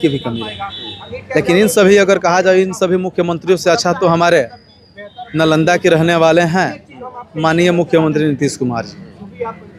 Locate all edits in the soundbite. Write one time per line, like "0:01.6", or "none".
none

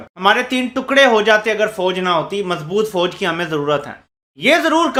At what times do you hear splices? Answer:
none

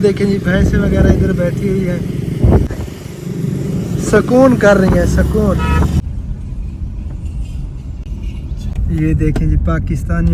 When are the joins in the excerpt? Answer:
0:02.7
0:06.0
0:08.7

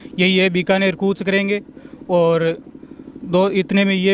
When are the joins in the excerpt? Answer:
none

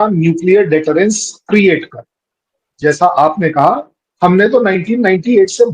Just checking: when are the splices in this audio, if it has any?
0:02.6

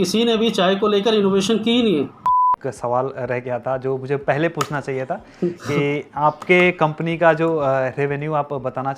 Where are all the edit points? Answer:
0:02.3

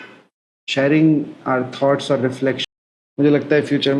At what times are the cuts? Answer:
0:02.6

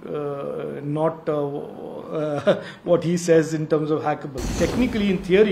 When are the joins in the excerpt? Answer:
0:04.5

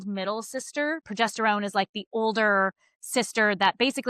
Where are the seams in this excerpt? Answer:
0:01.1

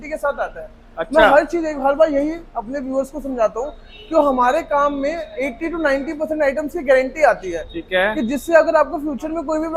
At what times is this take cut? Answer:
none

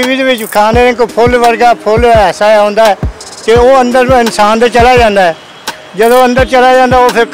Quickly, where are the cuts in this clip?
none

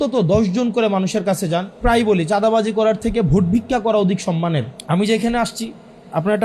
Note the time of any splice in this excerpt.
0:01.8
0:04.7

